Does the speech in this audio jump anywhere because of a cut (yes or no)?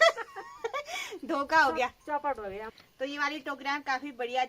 yes